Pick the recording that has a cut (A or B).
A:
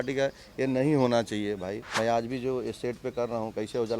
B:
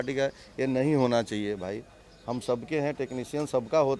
A